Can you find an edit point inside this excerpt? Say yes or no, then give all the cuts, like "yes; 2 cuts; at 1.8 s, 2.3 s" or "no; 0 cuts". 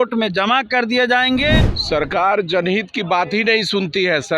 yes; 1 cut; at 1.7 s